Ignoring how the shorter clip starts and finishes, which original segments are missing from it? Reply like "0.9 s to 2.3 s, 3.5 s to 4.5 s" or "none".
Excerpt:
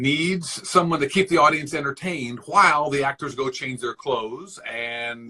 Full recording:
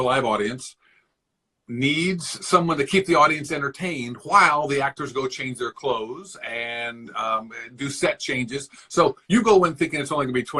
none